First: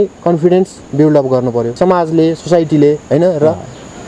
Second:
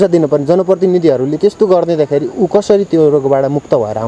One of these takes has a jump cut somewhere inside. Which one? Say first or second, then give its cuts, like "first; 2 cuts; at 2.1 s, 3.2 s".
first; 1 cut; at 1.7 s